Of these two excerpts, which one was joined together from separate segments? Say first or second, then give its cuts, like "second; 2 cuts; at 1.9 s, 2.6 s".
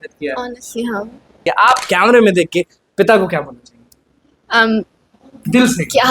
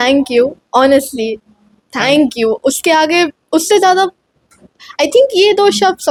first; 1 cut; at 1.4 s